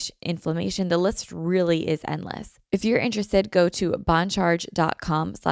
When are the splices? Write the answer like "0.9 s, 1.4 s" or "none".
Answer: 2.5 s